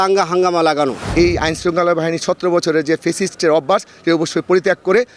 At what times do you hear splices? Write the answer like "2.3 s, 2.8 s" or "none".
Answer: 1.0 s